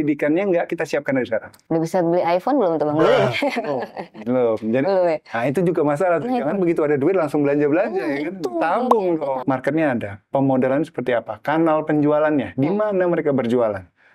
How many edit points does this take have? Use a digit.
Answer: 2